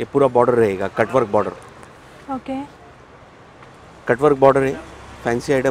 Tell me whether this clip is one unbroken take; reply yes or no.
yes